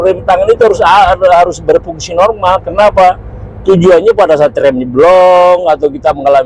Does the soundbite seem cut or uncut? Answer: uncut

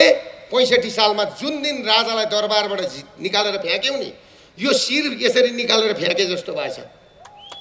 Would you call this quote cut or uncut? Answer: uncut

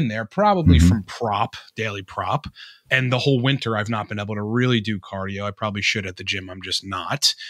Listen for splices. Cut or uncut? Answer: cut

